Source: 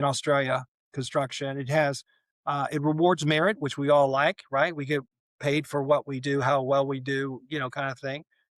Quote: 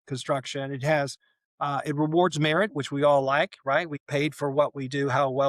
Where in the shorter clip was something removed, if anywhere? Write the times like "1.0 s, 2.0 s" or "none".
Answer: 3.9 s